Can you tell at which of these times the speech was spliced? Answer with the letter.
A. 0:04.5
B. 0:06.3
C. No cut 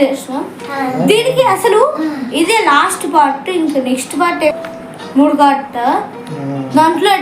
A